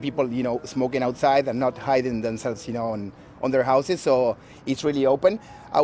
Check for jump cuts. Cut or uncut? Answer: uncut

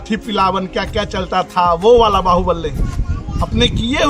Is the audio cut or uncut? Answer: uncut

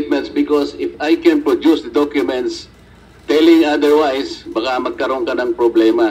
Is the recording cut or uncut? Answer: uncut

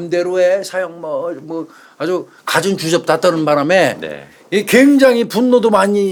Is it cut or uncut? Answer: uncut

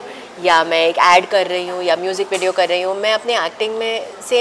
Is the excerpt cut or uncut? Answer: uncut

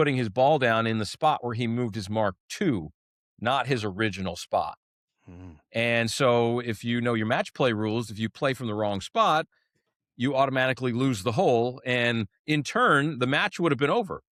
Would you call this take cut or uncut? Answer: uncut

